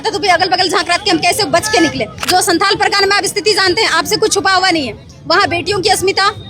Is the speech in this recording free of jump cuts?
no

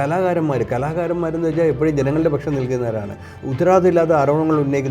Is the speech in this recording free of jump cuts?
no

